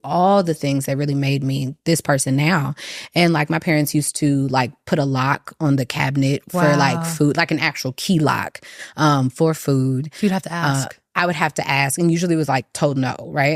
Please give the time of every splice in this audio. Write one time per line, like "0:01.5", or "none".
none

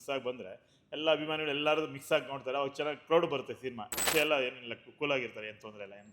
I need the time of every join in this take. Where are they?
0:04.1

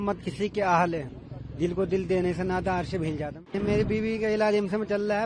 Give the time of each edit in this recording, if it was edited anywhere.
0:03.5

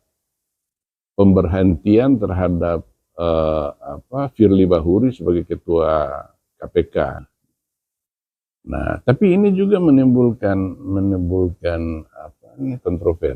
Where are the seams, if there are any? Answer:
0:07.3

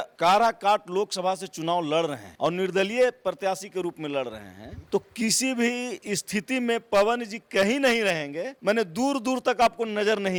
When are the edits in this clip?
none

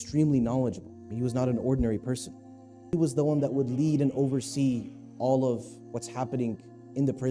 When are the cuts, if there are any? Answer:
0:02.9

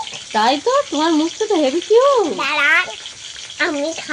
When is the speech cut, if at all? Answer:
0:02.5

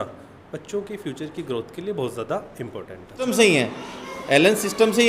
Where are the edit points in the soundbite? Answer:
0:03.3

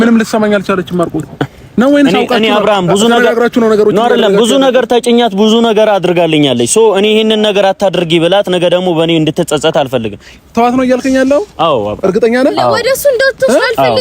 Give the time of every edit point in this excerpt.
0:10.3

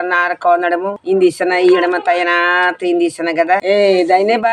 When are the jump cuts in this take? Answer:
0:01.0
0:03.6

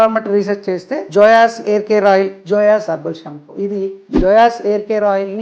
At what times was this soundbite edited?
0:00.9
0:02.4
0:04.0

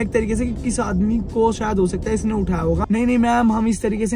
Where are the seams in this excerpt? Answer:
0:02.8

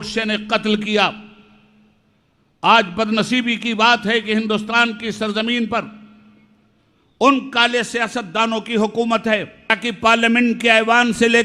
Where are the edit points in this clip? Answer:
0:09.8

